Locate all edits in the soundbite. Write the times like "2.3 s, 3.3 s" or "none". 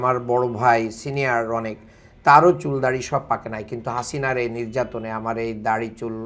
none

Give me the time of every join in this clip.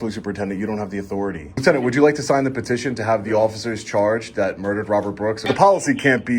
1.6 s, 5.5 s

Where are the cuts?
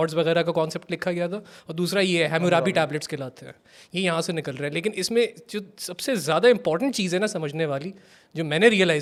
none

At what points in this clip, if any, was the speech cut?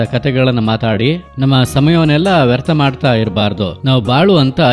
3.8 s

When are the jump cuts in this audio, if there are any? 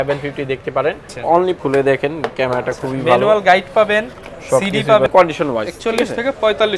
1.3 s, 5.1 s

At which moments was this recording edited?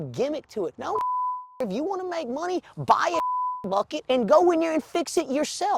none

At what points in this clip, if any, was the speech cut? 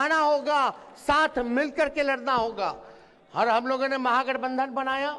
none

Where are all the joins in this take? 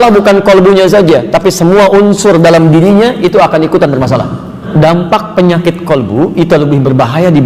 4.7 s

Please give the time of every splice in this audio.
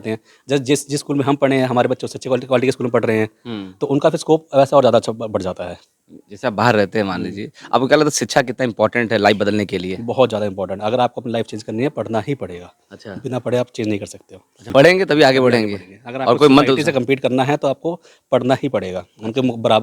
14.7 s

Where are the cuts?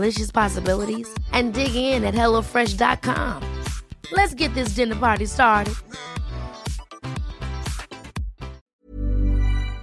8.7 s

